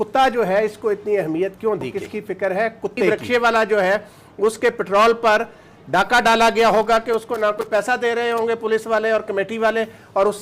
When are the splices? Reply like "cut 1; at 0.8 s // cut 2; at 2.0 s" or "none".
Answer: cut 1; at 2.0 s // cut 2; at 3.1 s